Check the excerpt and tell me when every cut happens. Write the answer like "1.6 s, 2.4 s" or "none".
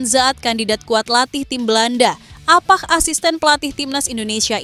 none